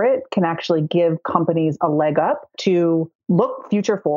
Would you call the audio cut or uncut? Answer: cut